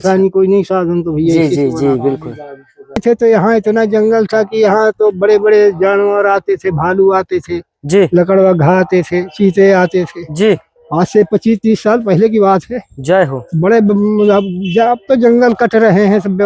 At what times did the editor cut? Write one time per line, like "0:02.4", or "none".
0:03.0